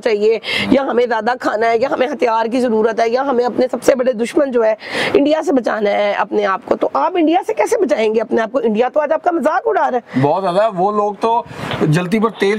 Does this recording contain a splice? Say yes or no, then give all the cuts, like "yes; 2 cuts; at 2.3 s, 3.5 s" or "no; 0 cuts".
no; 0 cuts